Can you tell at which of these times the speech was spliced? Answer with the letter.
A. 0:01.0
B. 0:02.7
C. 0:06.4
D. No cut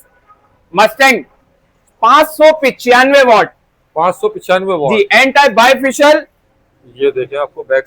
C